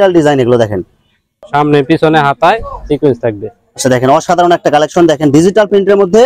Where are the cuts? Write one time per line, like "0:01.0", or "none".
0:01.3